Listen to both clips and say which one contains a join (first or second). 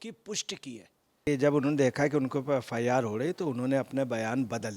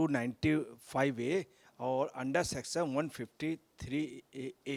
first